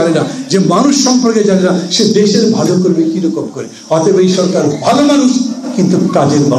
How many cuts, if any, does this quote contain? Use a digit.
0